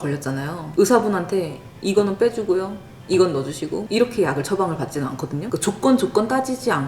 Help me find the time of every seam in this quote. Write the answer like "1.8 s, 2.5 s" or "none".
5.5 s